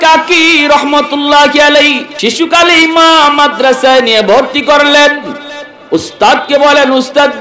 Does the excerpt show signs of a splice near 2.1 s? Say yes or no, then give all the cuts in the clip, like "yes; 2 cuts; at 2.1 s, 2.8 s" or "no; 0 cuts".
yes; 1 cut; at 2.1 s